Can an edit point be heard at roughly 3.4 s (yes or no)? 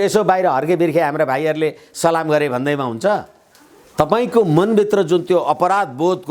no